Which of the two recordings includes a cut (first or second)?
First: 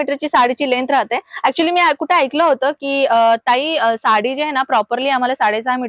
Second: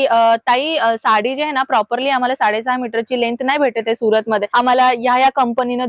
second